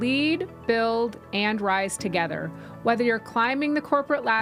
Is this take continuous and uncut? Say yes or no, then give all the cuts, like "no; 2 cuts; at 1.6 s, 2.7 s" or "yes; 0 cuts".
yes; 0 cuts